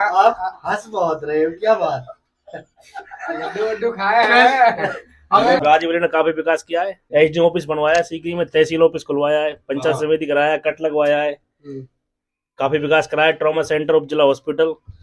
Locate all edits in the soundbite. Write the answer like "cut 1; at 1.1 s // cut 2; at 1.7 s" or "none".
cut 1; at 5.6 s // cut 2; at 7.0 s